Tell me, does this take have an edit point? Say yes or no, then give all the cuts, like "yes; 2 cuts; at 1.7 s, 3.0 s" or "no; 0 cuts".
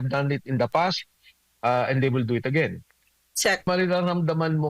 yes; 1 cut; at 3.7 s